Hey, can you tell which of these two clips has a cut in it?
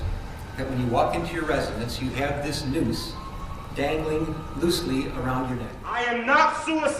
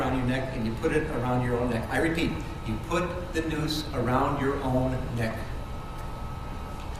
first; 1 cut; at 5.8 s

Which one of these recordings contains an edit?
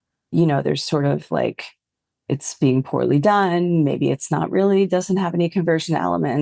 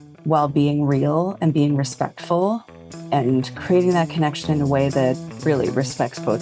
second; 1 cut; at 5.3 s

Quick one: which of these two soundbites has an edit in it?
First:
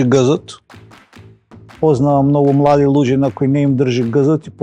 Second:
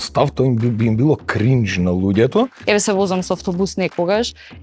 second; 1 cut; at 2.6 s

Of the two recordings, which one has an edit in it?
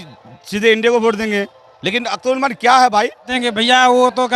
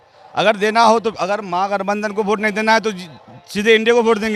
first; 1 cut; at 3.3 s

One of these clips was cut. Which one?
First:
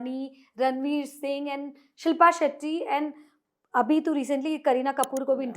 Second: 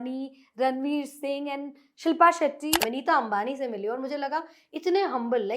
second; 1 cut; at 2.8 s

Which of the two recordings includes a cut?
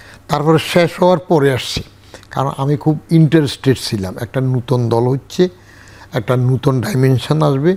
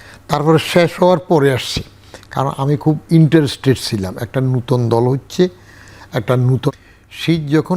second; 1 cut; at 6.7 s

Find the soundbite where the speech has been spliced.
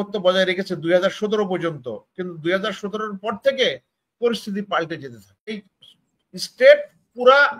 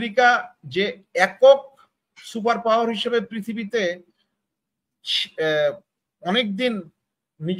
first; 1 cut; at 5.5 s

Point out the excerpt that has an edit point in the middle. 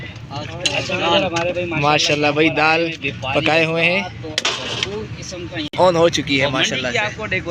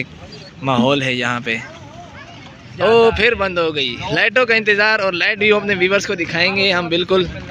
second; 1 cut; at 2.7 s

